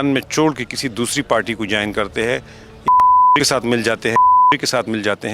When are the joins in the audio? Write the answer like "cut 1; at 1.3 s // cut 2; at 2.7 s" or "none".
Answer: none